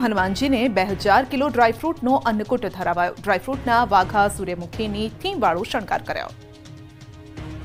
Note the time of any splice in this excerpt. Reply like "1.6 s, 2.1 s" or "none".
none